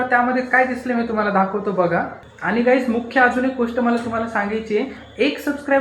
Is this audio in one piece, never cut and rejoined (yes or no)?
no